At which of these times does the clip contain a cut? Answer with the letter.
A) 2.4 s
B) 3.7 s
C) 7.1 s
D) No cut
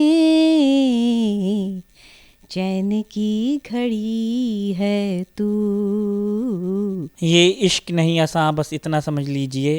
C